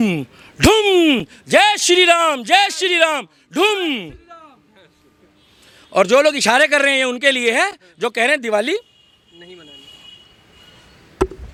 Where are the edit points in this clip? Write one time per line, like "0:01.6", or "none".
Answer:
none